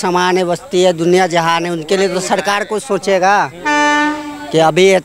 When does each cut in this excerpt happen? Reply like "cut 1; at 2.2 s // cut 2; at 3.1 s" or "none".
none